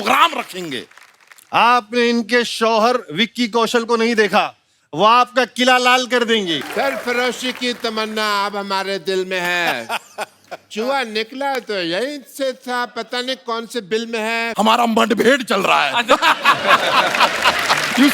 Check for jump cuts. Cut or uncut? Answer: cut